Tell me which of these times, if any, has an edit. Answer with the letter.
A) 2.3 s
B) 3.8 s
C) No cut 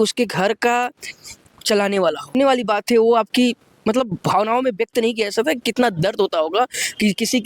A